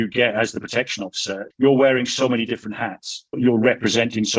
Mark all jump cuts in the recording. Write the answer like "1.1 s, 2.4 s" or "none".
1.4 s, 3.4 s